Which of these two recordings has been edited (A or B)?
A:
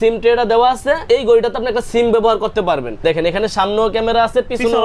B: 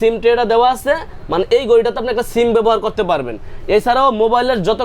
A